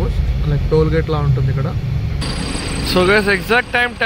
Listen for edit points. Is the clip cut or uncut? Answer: cut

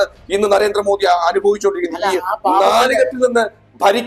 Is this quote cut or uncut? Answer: uncut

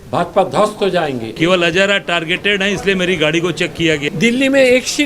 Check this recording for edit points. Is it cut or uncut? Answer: cut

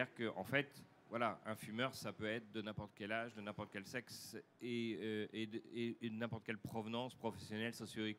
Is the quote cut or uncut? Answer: cut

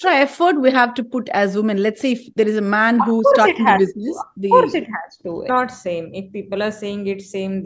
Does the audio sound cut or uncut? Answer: cut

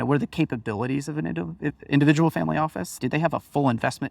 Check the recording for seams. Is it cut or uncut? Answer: cut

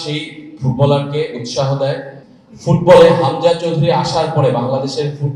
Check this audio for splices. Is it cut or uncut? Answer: cut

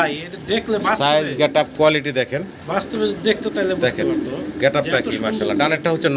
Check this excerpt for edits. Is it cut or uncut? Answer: uncut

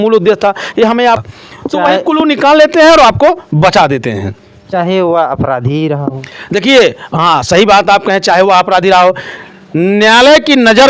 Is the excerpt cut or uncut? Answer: cut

